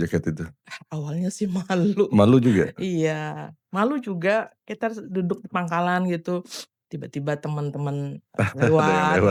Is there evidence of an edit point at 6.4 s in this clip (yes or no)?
no